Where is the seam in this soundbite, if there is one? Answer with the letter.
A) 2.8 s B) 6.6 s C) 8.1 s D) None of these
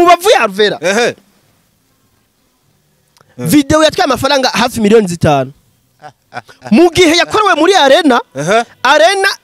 D